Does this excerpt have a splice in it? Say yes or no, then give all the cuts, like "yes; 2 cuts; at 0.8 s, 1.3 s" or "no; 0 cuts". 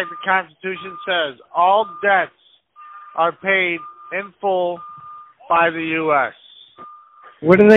no; 0 cuts